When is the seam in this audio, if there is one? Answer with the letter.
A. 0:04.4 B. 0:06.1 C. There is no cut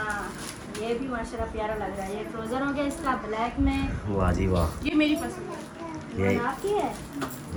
C